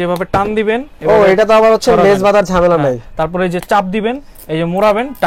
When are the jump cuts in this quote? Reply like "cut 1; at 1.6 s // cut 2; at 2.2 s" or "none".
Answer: none